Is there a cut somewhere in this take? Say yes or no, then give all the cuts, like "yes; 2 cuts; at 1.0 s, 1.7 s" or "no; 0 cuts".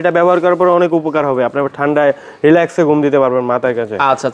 no; 0 cuts